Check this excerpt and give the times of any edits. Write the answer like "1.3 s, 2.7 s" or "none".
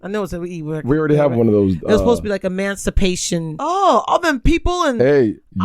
3.5 s